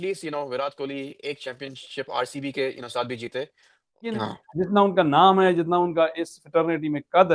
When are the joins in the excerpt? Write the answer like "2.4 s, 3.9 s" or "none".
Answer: 4.1 s